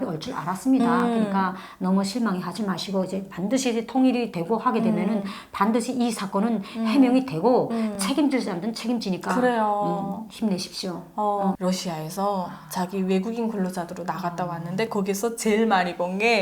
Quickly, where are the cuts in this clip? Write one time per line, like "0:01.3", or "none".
0:11.6

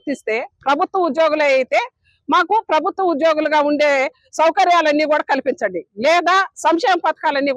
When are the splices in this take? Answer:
0:06.1

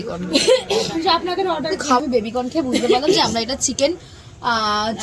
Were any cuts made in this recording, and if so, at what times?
0:02.0

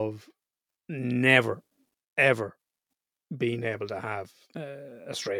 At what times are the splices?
0:04.4

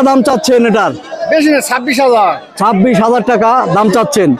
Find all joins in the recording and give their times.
none

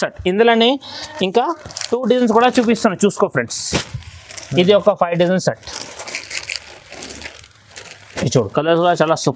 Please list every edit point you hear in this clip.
0:08.4

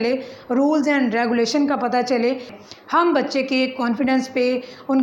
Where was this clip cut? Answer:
0:02.5

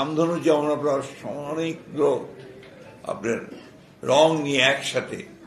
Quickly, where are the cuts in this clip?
none

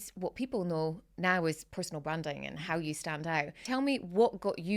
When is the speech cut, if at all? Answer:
0:03.6

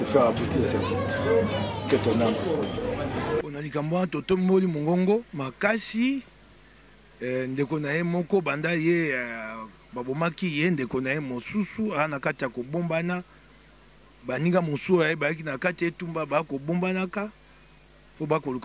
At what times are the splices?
0:03.4

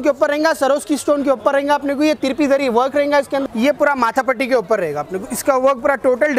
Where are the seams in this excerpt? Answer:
0:03.4

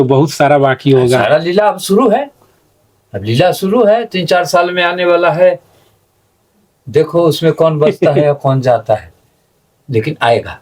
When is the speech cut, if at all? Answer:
none

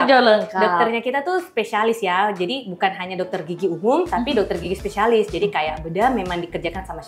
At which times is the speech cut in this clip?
none

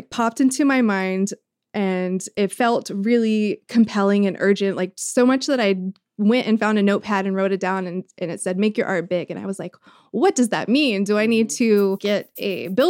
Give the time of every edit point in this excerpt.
0:12.0

